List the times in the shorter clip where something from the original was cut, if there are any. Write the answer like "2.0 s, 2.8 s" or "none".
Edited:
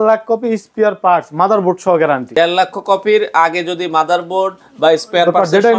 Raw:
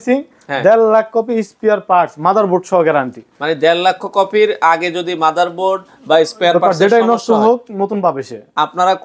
2.3 s